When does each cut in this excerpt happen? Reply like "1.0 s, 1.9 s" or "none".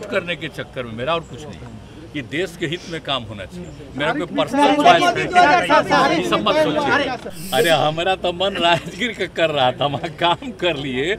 7.3 s